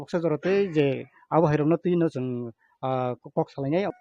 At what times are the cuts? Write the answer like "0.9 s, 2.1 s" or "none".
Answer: 1.1 s

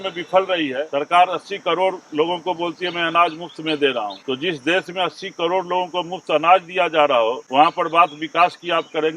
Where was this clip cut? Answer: 0.8 s, 4.2 s, 7.4 s

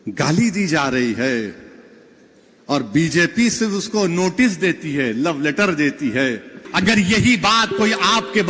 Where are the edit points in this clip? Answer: 6.6 s

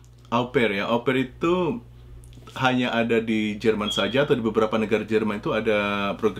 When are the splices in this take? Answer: none

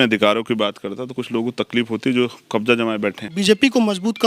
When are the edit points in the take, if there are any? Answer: 3.3 s

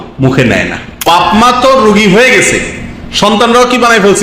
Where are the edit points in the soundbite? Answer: 1.0 s

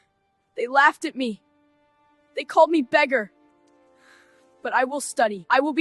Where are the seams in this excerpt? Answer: none

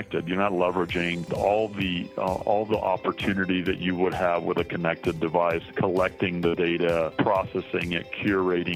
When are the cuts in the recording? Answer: 1.2 s, 5.7 s, 7.1 s

